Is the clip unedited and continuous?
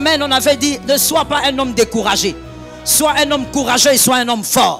yes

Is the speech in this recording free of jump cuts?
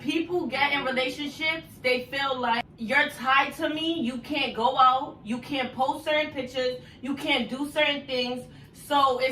no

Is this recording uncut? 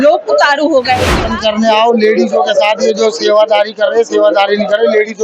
no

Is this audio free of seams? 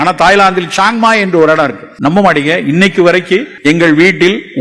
no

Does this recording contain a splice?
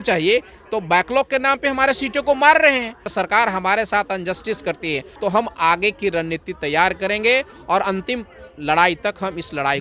yes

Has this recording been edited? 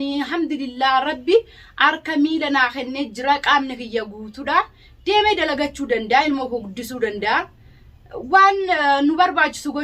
no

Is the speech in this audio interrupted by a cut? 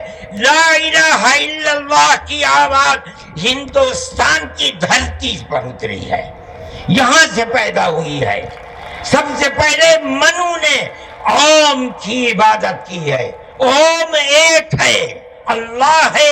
no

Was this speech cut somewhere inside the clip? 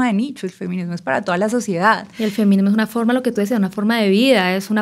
no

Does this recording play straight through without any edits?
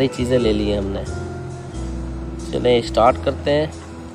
no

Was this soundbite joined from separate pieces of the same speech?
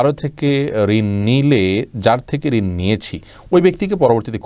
no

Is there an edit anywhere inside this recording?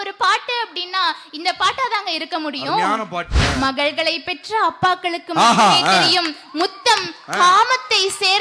yes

